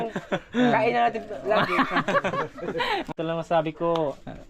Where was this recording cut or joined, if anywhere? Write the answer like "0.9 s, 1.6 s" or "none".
3.1 s